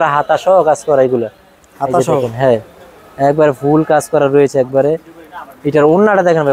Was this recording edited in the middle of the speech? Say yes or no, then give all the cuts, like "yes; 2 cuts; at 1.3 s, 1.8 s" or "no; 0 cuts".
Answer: no; 0 cuts